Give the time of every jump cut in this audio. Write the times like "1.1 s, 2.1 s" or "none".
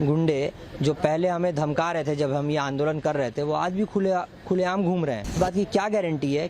5.4 s